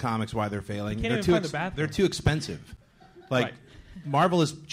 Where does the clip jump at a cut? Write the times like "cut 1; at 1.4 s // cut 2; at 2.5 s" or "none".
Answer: none